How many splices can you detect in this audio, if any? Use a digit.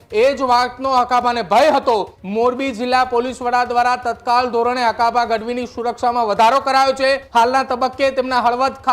2